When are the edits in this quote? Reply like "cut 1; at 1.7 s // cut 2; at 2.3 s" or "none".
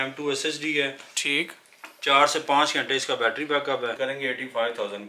cut 1; at 4.0 s